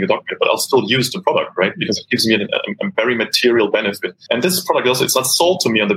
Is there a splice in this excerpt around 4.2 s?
yes; 1 cut; at 4.2 s

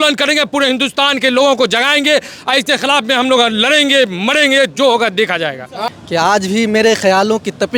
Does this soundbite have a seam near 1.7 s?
no; 1 cut; at 5.8 s

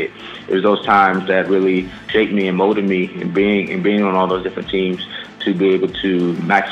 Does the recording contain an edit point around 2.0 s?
yes; 1 cut; at 2.0 s

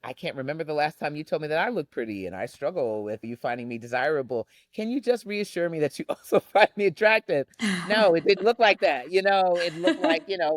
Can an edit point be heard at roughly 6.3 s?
no; 1 cut; at 3.2 s

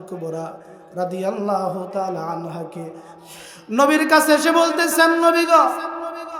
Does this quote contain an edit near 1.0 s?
no; 1 cut; at 3.1 s

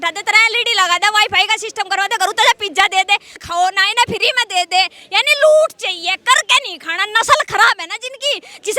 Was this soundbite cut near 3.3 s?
yes; 1 cut; at 3.3 s

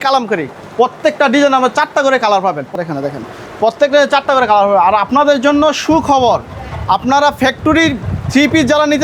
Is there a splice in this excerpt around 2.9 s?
yes; 1 cut; at 2.9 s

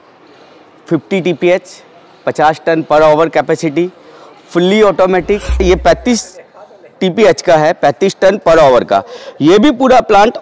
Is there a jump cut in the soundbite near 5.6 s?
yes; 1 cut; at 5.6 s

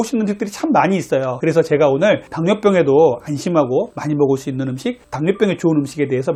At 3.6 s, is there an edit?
no; 0 cuts

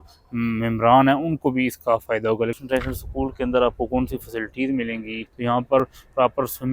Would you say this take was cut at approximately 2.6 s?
yes; 2 cuts; at 2.6 s, 5.8 s

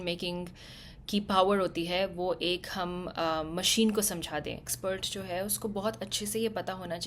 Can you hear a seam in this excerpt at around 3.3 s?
no; 1 cut; at 4.7 s

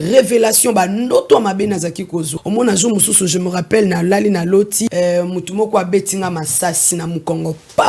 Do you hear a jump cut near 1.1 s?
no; 3 cuts; at 2.3 s, 4.9 s, 6.9 s

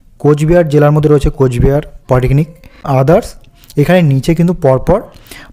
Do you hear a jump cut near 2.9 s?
yes; 1 cut; at 2.9 s

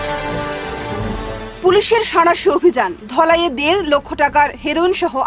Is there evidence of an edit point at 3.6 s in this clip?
no; 1 cut; at 1.1 s

